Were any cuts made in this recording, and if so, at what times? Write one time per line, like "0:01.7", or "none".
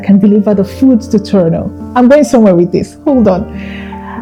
none

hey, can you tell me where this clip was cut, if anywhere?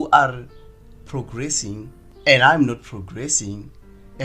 0:02.0

